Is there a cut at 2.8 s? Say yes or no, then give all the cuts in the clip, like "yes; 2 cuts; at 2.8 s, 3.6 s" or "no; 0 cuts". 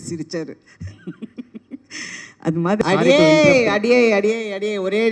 yes; 1 cut; at 2.8 s